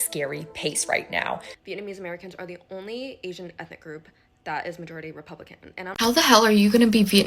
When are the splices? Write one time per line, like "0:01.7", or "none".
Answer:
0:01.5
0:05.9